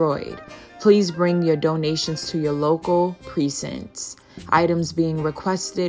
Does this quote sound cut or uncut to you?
uncut